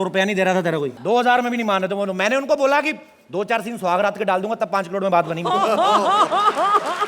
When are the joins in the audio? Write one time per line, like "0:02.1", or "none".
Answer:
0:01.0